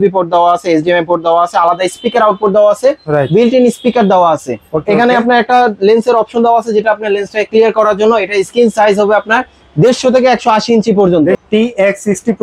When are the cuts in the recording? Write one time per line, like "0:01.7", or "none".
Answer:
0:11.4